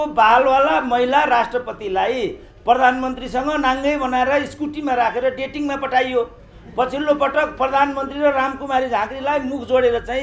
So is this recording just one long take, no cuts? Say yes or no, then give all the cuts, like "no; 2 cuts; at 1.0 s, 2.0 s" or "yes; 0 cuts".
yes; 0 cuts